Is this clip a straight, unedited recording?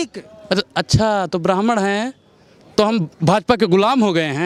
yes; 0 cuts

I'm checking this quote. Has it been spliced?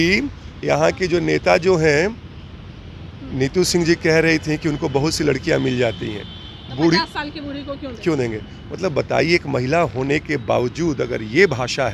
no; 0 cuts

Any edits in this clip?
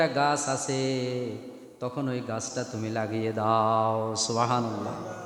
no; 0 cuts

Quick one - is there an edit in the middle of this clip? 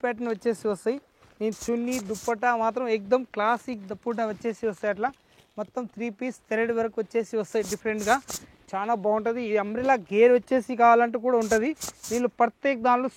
no; 0 cuts

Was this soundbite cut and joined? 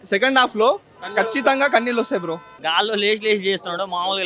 yes; 1 cut; at 2.5 s

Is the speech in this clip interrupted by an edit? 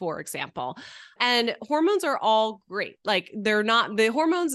no; 0 cuts

